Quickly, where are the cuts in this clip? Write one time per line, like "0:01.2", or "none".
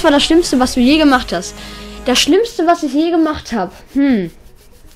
none